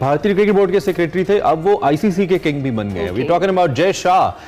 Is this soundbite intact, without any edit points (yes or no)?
yes